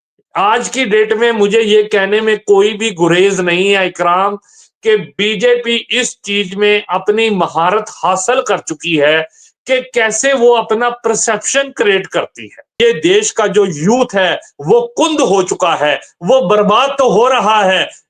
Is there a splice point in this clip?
yes; 1 cut; at 12.6 s

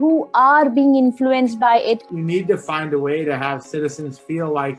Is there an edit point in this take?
yes; 1 cut; at 2.0 s

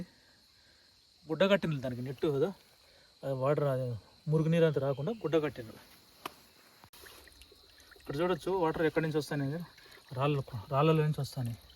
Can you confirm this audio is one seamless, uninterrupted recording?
no; 1 cut; at 6.9 s

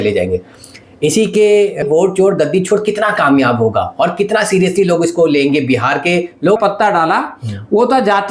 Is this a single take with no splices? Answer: no; 2 cuts; at 1.8 s, 6.6 s

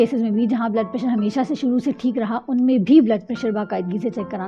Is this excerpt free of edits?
yes; 0 cuts

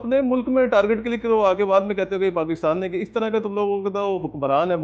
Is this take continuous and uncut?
yes; 0 cuts

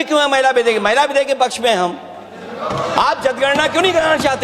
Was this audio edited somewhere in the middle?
no; 0 cuts

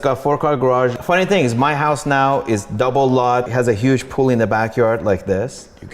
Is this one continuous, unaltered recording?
no; 2 cuts; at 1.0 s, 3.5 s

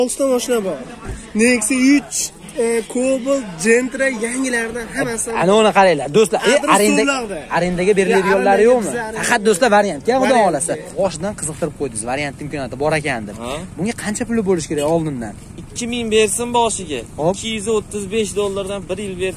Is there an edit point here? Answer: yes; 1 cut; at 10.8 s

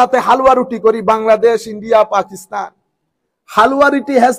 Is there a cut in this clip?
no; 0 cuts

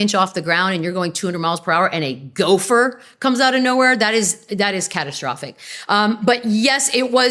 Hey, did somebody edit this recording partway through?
no; 0 cuts

